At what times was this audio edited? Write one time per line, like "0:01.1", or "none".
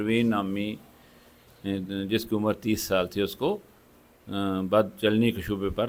none